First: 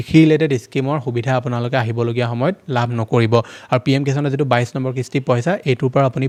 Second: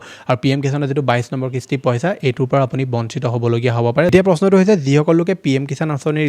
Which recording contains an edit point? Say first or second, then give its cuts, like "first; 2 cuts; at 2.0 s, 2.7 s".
second; 1 cut; at 4.1 s